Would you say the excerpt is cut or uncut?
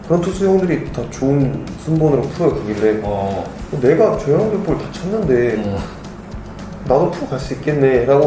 uncut